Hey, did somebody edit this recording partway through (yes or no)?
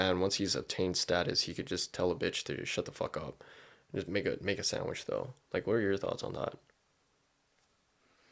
no